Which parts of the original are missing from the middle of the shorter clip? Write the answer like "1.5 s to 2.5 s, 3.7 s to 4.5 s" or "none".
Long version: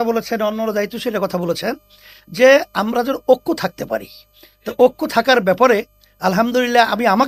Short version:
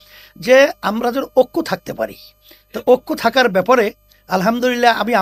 none